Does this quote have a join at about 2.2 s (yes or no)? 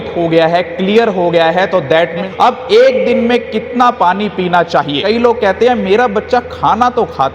yes